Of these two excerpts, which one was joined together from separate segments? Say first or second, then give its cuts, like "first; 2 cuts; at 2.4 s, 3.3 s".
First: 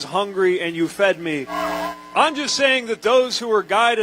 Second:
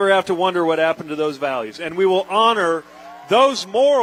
first; 1 cut; at 1.5 s